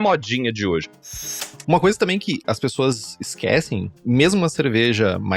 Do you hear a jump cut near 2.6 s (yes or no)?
no